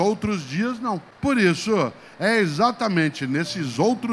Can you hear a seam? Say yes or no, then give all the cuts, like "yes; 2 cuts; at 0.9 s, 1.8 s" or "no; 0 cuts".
yes; 1 cut; at 1.1 s